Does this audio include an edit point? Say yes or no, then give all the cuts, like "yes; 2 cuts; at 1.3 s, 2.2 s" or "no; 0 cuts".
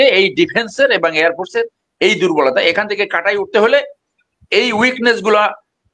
no; 0 cuts